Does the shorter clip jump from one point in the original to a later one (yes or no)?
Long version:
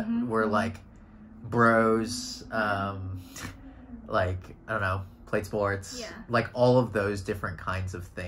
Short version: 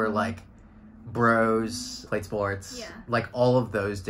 yes